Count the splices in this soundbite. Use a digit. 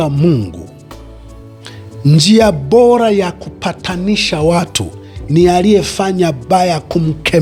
0